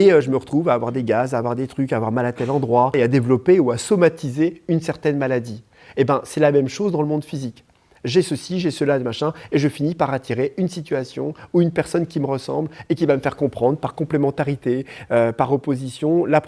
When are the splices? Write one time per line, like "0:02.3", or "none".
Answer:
0:02.9